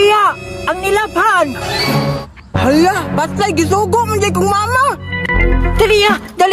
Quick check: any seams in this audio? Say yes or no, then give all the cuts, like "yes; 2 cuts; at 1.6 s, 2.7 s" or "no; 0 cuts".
no; 0 cuts